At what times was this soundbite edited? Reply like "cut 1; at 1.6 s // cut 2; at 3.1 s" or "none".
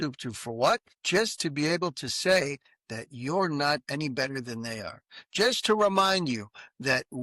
cut 1; at 0.9 s